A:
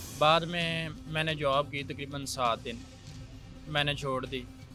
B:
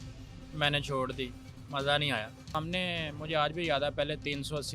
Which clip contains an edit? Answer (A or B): B